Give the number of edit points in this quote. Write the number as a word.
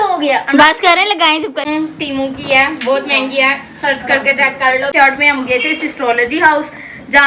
two